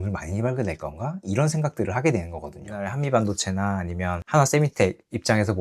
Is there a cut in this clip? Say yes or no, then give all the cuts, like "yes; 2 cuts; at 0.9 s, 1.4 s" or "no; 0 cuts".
yes; 1 cut; at 2.8 s